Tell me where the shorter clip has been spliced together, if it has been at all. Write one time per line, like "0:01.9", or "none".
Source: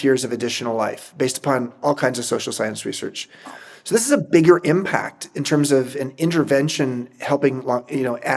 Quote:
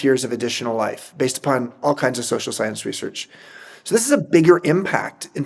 none

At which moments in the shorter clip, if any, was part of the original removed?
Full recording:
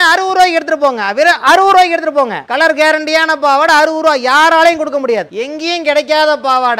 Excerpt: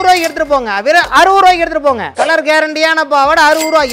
none

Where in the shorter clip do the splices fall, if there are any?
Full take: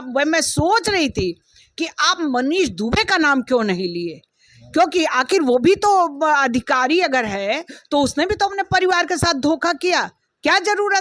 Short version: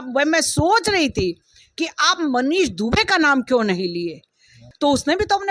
0:04.6

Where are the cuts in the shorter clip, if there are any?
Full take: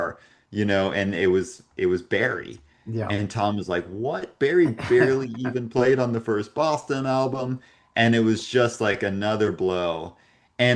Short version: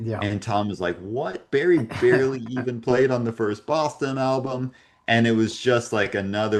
none

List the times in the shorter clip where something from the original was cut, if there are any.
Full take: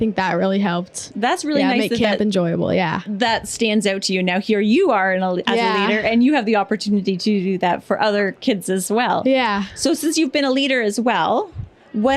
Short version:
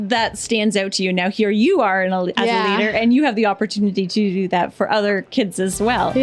none

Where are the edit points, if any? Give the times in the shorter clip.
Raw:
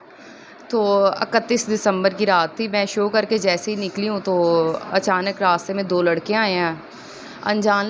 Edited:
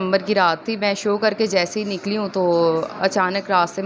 none

